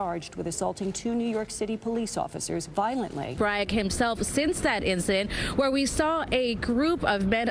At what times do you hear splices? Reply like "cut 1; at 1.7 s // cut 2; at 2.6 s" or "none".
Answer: none